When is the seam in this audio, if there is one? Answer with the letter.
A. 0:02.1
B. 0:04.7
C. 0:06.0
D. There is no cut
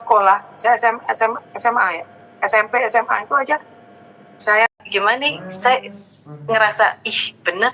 B